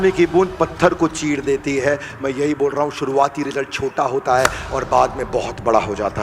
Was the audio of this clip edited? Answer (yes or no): no